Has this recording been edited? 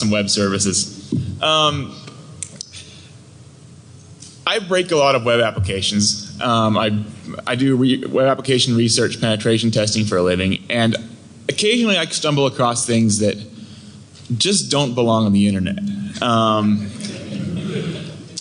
no; 0 cuts

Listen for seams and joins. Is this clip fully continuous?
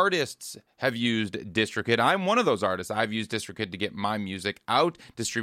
yes; 0 cuts

